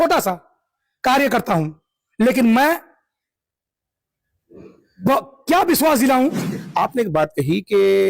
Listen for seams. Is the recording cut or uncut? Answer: cut